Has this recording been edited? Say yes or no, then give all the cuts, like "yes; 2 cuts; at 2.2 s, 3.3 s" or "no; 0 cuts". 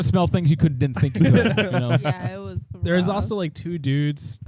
no; 0 cuts